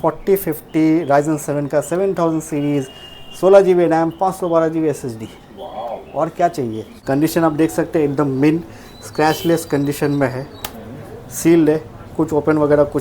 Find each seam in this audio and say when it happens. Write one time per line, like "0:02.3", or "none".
0:06.9